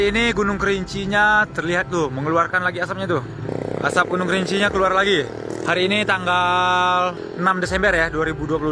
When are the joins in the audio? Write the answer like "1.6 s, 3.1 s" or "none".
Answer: 5.5 s